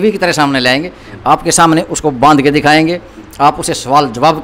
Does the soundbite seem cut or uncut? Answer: uncut